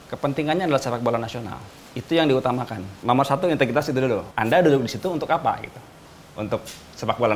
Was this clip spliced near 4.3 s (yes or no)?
yes